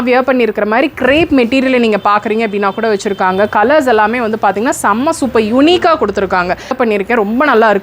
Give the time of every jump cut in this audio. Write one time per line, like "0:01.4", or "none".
0:06.7